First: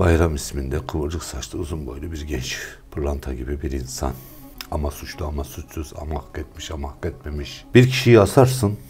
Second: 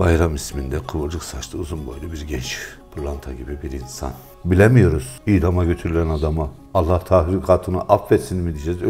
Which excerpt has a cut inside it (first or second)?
second